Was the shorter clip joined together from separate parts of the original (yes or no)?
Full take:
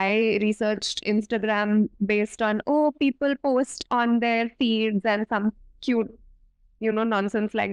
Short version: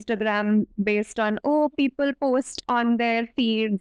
no